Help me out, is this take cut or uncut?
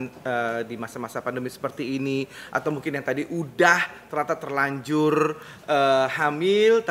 uncut